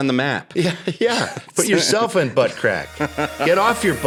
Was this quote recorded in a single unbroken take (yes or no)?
yes